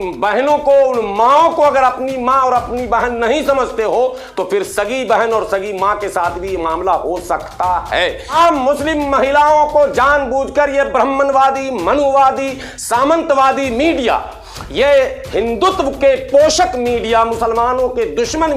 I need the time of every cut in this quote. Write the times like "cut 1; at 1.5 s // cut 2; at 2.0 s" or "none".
cut 1; at 8.3 s

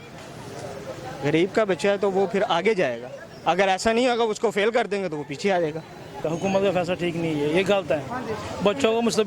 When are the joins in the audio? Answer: cut 1; at 6.2 s

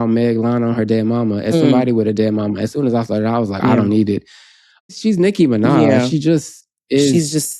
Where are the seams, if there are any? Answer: cut 1; at 3.6 s // cut 2; at 4.9 s

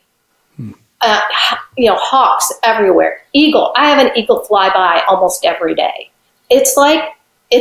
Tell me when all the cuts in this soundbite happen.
cut 1; at 6.3 s

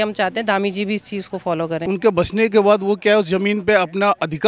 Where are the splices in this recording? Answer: cut 1; at 1.8 s

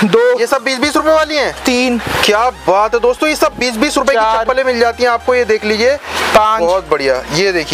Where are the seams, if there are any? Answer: none

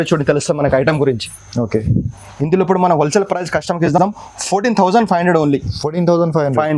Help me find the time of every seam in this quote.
none

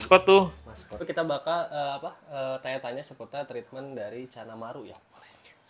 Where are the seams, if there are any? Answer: cut 1; at 1.0 s

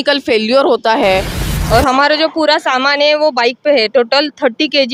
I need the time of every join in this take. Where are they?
cut 1; at 1.5 s

